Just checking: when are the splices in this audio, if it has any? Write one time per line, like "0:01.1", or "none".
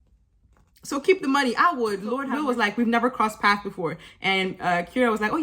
0:02.3